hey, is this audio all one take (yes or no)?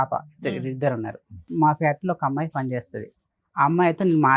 no